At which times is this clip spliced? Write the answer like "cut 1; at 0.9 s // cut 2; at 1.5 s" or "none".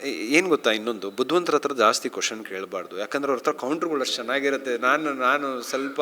none